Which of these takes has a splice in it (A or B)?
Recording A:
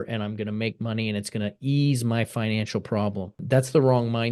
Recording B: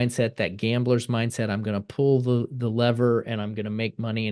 A